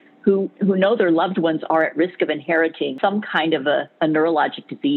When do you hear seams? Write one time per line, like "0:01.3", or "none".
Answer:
0:02.9
0:03.9